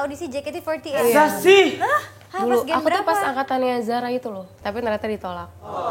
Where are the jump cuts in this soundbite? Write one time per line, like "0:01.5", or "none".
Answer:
0:01.0
0:04.5